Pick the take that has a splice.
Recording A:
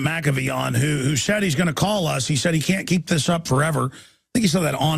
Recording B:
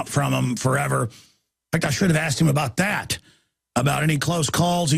B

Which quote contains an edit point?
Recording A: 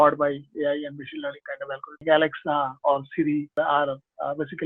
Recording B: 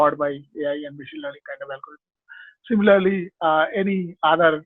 A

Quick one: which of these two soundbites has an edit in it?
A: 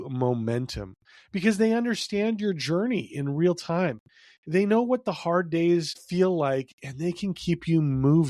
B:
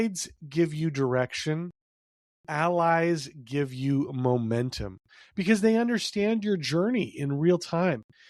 A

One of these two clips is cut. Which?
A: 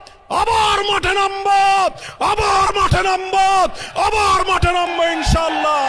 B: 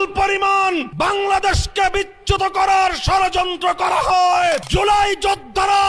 B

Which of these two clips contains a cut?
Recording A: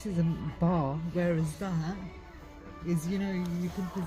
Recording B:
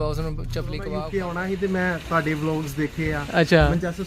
B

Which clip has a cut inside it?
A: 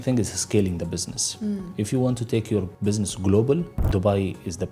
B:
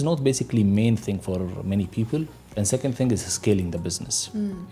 A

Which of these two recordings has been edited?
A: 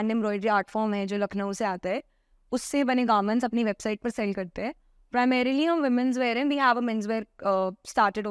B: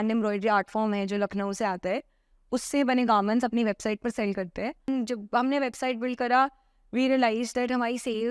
B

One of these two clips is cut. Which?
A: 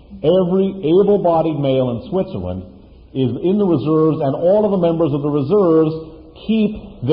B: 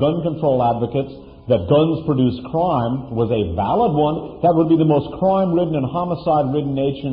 B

